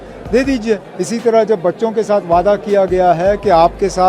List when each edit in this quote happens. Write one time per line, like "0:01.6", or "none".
0:00.9